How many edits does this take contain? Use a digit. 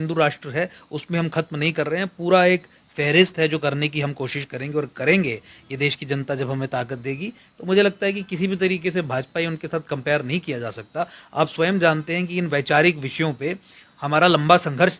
0